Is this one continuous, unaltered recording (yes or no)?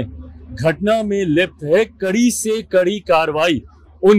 yes